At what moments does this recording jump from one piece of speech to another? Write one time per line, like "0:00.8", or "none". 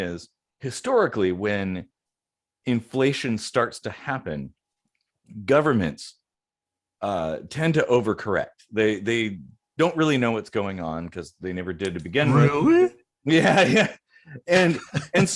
none

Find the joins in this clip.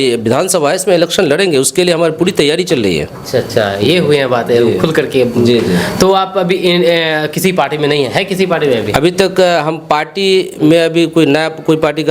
none

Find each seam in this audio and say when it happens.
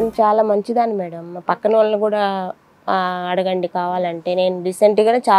none

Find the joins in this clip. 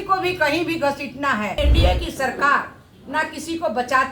0:01.6

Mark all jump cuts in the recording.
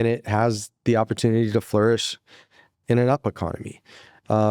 none

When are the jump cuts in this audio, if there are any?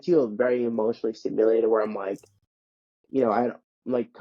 none

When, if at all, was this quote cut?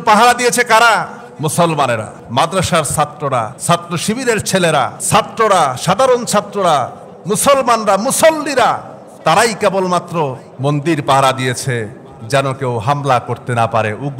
0:01.2
0:02.2
0:03.5
0:05.0
0:10.5

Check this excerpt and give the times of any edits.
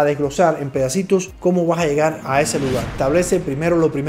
0:02.9

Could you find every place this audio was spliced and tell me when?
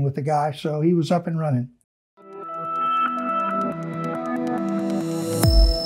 0:01.9

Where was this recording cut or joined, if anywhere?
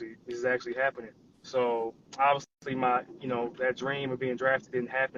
none

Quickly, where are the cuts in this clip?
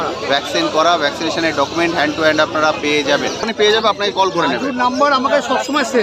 0:03.5

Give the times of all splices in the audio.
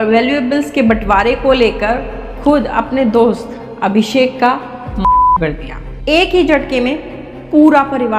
none

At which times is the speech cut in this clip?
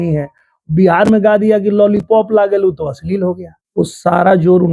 0:03.5

